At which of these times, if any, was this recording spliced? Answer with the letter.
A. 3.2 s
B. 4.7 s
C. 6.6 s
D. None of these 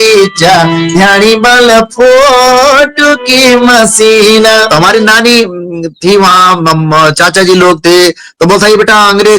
B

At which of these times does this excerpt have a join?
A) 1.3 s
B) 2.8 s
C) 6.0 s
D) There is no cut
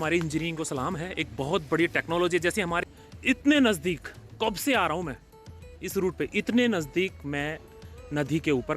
B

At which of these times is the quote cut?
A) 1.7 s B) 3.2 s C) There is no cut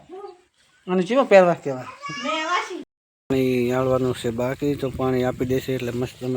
B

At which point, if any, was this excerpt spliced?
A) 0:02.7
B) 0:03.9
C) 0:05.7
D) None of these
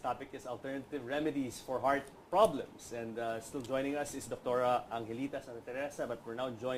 B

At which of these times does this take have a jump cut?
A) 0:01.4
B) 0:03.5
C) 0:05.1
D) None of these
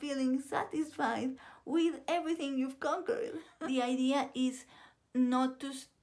B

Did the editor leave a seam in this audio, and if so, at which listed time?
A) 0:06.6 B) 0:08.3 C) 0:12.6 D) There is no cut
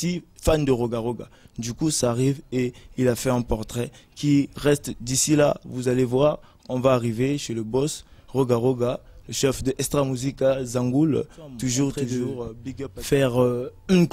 C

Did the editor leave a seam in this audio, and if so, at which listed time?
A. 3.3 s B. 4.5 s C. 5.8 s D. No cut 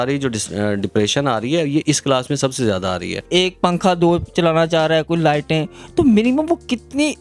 A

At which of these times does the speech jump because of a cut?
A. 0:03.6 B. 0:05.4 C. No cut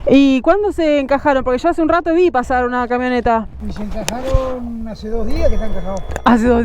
A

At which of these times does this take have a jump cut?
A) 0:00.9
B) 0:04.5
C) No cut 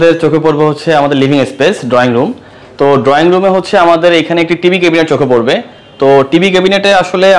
C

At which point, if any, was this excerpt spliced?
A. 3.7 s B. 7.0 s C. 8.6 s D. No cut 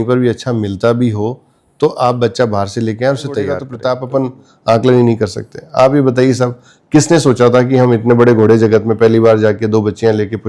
A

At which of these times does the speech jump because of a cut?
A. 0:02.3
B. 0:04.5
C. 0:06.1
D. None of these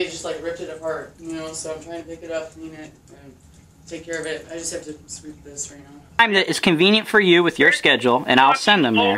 C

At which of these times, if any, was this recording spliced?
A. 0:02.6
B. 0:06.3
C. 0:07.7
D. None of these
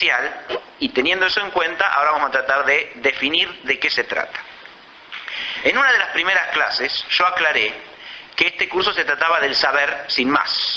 B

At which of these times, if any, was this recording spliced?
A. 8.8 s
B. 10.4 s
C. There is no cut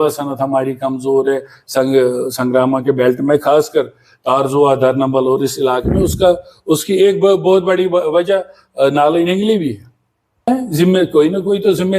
B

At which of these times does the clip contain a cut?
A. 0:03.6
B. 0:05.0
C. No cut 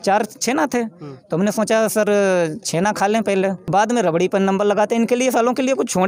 A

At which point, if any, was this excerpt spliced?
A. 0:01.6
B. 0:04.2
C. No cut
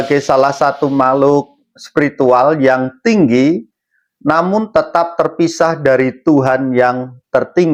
C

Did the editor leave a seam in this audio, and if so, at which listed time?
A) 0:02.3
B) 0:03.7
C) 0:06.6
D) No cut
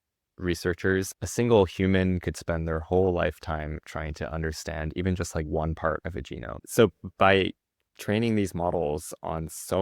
C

